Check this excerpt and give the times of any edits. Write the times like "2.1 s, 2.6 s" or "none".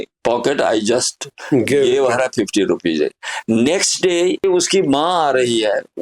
4.4 s